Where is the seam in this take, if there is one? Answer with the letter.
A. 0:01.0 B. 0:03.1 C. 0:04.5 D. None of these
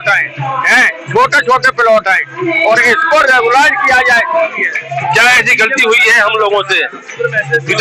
C